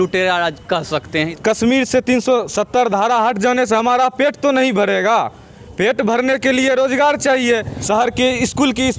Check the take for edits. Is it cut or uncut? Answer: cut